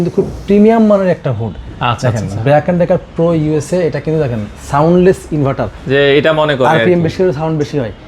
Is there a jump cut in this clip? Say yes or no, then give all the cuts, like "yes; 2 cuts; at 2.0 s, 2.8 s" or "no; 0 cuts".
no; 0 cuts